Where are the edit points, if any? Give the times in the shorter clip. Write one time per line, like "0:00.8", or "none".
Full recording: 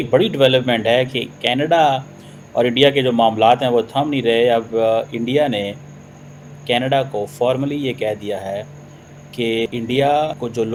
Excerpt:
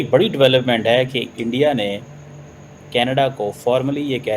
0:01.4